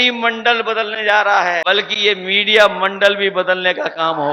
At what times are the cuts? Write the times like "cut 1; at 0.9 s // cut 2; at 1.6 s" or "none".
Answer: cut 1; at 1.6 s